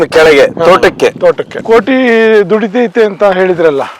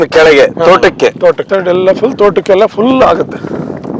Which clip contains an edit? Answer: first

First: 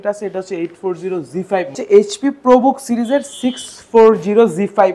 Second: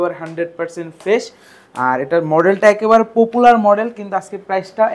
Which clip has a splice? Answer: first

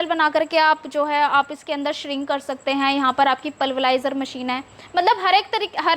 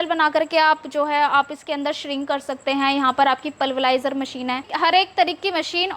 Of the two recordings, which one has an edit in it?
second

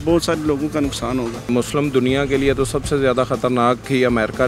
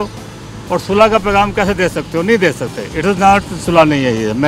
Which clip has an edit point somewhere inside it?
first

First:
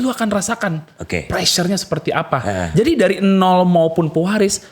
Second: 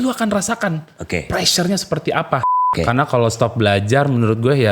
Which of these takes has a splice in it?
second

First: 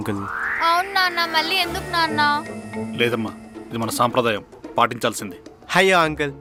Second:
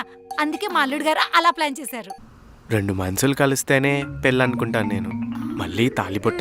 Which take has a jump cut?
second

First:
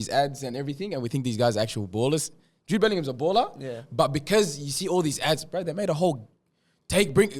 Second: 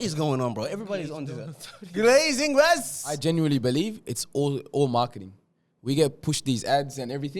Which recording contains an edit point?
second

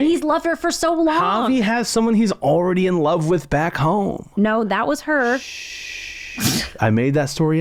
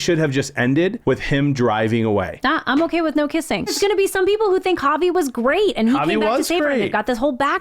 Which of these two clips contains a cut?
second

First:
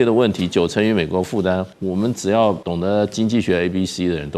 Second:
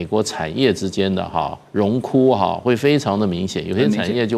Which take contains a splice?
first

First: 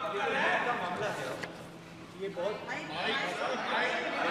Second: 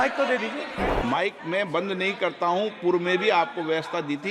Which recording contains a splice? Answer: second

